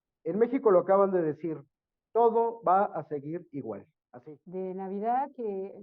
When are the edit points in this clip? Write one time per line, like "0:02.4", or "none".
0:04.0